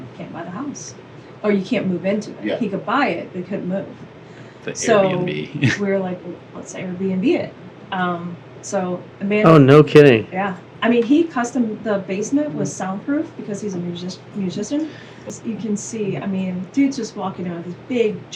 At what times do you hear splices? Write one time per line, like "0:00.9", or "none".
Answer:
0:15.3